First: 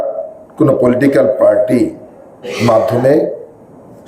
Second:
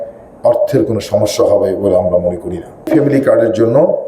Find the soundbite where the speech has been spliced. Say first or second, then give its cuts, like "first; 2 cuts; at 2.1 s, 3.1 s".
second; 1 cut; at 2.9 s